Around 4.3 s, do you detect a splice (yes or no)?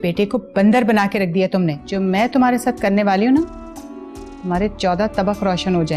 no